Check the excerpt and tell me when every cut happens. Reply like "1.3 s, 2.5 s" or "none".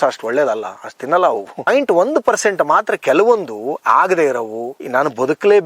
none